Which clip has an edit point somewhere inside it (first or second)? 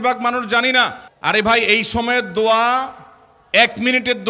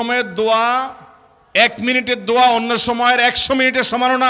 first